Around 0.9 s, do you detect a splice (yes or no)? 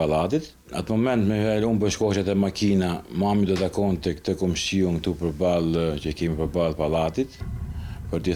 no